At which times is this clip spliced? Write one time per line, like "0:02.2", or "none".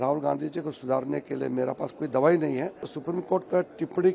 0:02.9